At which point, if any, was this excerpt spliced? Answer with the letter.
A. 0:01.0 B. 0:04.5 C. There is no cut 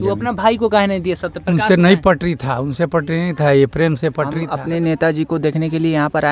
B